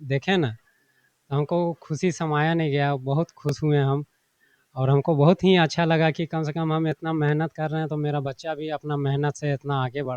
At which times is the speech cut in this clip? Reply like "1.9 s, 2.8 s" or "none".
none